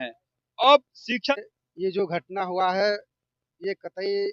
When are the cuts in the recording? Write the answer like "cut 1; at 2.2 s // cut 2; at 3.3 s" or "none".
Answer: cut 1; at 1.3 s